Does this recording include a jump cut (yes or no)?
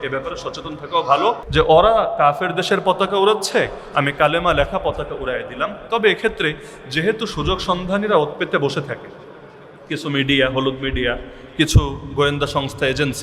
yes